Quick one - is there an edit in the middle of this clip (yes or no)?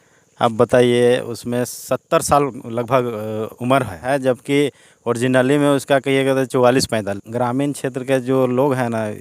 yes